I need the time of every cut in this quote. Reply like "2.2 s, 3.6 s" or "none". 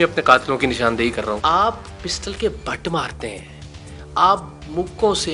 1.4 s